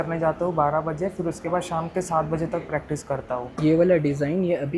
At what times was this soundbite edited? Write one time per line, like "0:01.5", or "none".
0:03.5